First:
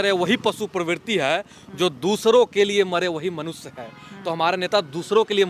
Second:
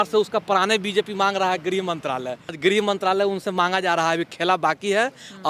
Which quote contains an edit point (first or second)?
second